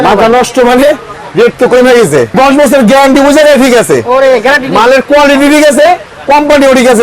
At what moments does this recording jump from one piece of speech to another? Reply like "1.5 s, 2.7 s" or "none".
2.3 s